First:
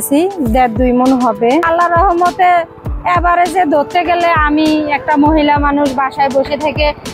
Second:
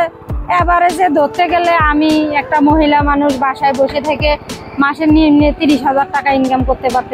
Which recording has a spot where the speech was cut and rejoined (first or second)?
first